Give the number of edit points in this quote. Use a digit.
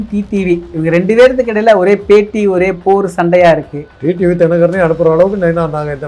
1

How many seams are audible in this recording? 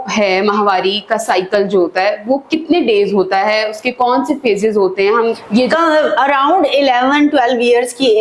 1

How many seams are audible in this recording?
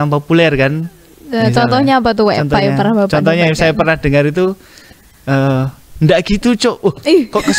0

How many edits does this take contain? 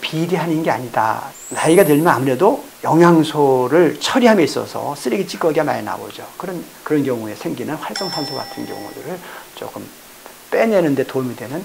1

